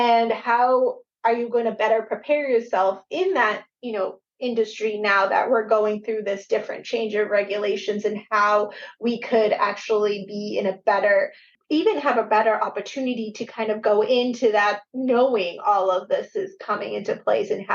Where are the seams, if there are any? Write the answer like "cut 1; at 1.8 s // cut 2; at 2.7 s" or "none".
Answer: cut 1; at 11.5 s